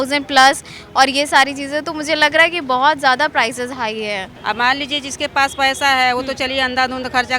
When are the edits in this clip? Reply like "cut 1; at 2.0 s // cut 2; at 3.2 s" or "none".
cut 1; at 4.3 s